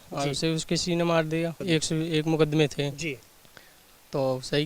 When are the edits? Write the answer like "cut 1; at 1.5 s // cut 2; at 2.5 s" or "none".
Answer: cut 1; at 1.6 s